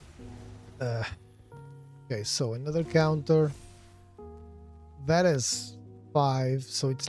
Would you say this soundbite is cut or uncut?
uncut